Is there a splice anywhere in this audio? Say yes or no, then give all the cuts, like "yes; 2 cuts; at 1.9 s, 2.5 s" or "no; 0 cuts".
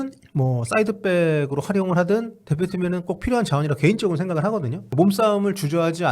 yes; 1 cut; at 4.8 s